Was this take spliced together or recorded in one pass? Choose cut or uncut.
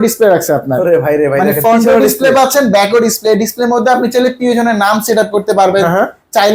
uncut